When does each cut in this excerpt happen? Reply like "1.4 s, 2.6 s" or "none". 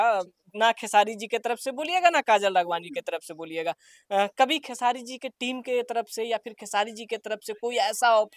none